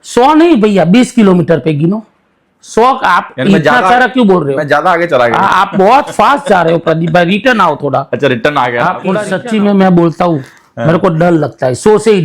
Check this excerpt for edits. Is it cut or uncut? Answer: cut